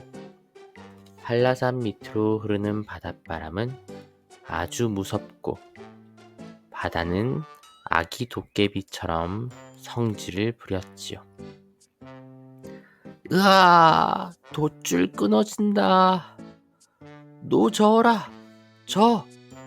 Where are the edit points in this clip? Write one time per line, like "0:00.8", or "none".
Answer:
0:11.8
0:13.2